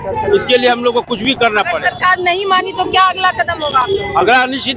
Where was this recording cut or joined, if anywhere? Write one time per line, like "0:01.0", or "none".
none